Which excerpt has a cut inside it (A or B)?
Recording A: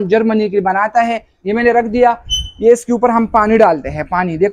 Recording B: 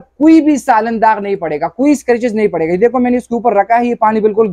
A